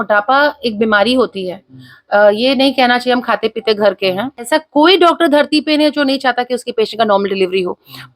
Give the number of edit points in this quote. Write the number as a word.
one